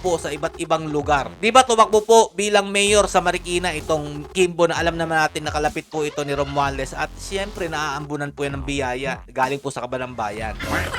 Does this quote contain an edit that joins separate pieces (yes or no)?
yes